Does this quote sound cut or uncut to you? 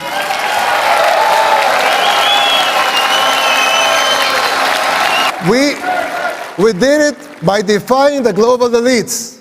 cut